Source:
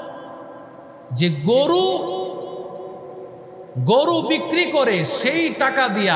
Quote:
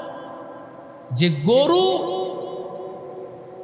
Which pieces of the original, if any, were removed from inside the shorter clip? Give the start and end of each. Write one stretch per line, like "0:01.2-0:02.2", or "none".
none